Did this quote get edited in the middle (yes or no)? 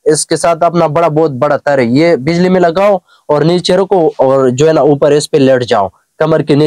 no